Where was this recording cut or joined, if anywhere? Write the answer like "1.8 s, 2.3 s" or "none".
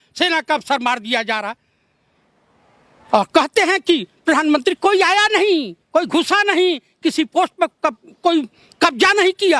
none